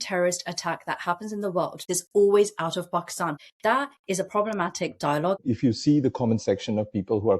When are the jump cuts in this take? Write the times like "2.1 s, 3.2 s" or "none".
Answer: 1.8 s, 3.4 s, 5.4 s